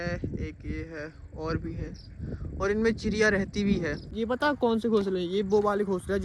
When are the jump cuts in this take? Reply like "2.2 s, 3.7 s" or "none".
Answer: 4.1 s

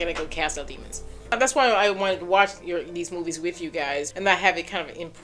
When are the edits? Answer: 1.3 s, 4.1 s

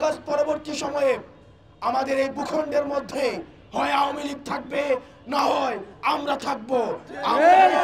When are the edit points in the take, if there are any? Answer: none

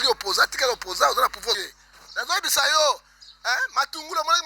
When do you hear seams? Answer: 1.5 s

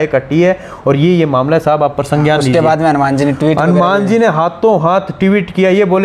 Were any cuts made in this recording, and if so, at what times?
none

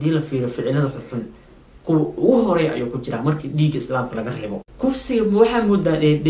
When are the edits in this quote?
none

